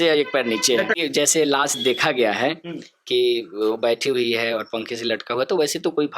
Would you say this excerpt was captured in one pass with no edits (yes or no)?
no